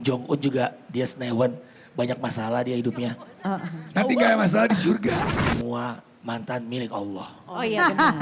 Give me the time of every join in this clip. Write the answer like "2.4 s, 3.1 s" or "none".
5.3 s